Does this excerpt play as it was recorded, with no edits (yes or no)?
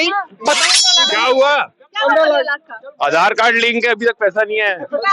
no